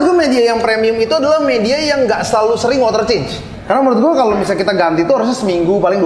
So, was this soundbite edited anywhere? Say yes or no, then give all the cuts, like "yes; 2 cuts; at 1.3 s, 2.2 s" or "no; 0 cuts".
yes; 1 cut; at 3.5 s